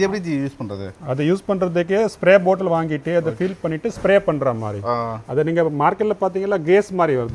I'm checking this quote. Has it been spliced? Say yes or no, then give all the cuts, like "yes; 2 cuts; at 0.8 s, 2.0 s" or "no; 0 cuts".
no; 0 cuts